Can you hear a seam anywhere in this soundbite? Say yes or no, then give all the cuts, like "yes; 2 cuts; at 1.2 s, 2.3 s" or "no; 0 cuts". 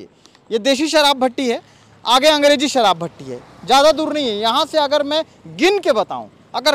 no; 0 cuts